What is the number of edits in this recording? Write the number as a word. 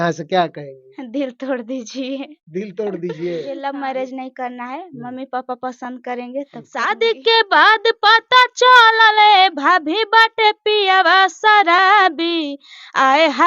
two